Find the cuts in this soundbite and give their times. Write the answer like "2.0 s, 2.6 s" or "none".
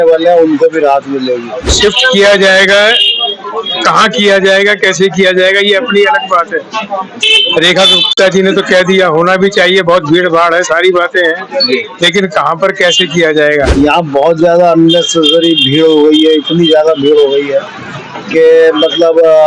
1.8 s, 13.7 s